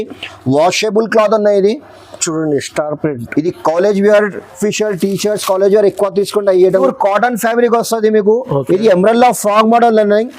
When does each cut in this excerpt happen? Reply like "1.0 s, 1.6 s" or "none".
4.5 s, 6.7 s